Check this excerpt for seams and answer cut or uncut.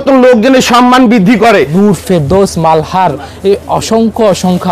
cut